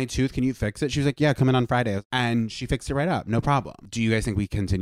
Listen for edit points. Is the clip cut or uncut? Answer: cut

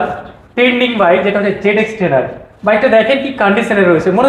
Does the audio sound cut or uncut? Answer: uncut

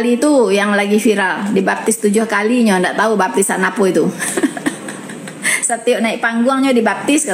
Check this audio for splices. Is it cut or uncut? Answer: uncut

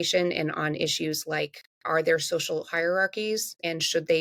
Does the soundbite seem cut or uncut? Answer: uncut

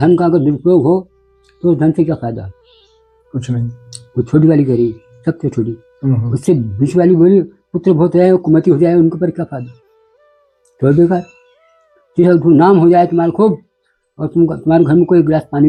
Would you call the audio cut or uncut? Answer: uncut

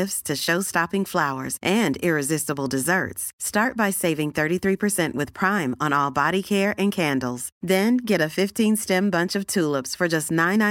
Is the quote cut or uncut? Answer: uncut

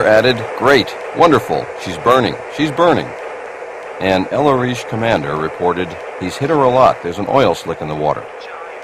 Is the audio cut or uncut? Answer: uncut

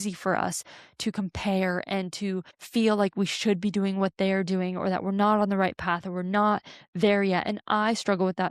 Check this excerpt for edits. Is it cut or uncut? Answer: cut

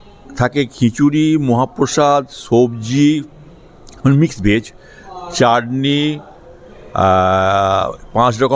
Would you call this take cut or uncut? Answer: uncut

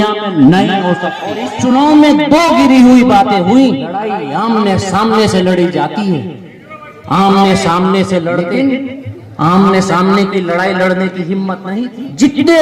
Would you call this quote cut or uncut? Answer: cut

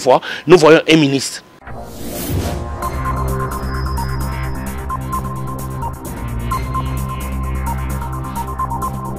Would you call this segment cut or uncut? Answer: cut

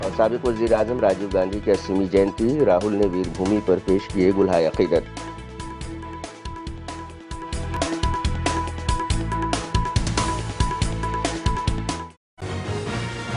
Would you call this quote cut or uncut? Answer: cut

